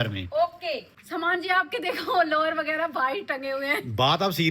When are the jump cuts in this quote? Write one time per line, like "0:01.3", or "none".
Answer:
0:00.9